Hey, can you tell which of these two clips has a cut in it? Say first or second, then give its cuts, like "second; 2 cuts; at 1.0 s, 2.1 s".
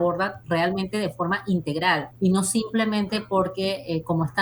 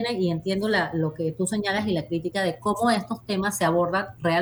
first; 1 cut; at 2.1 s